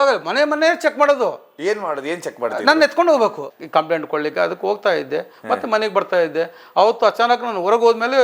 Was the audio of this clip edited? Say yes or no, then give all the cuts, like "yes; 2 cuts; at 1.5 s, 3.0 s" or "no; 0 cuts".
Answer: yes; 1 cut; at 3.5 s